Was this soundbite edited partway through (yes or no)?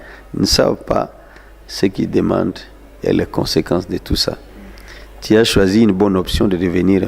no